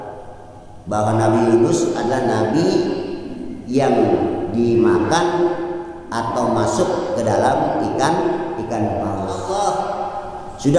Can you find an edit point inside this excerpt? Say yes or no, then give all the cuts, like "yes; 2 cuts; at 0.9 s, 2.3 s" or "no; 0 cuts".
yes; 1 cut; at 9.5 s